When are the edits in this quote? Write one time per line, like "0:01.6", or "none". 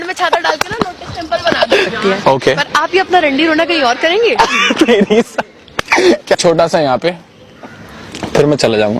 0:01.9
0:06.4